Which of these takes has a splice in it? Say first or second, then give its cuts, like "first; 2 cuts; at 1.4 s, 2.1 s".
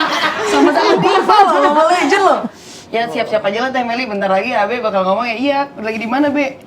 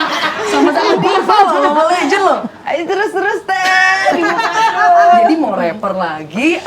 first; 1 cut; at 2.5 s